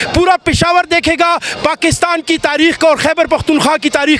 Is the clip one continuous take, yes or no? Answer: yes